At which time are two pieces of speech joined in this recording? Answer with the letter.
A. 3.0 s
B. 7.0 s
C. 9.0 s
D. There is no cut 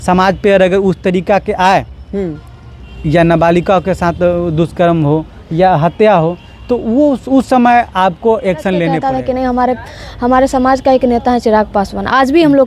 C